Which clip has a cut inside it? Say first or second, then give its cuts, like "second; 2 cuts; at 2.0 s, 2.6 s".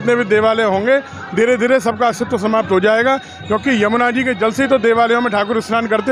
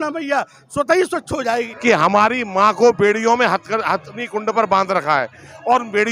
second; 1 cut; at 1.5 s